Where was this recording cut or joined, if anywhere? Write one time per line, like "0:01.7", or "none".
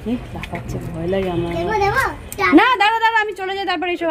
none

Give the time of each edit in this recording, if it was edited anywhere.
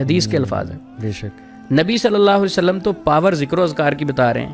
none

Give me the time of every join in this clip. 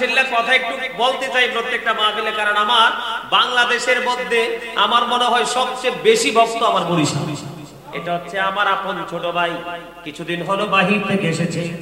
0:07.9

